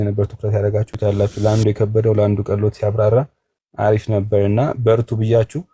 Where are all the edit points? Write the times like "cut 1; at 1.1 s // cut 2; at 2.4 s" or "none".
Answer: cut 1; at 0.9 s